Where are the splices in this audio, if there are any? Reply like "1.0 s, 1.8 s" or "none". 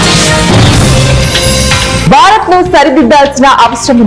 2.0 s